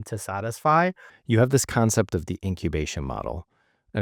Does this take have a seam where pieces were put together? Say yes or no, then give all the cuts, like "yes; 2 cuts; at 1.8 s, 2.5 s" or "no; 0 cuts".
yes; 1 cut; at 1.1 s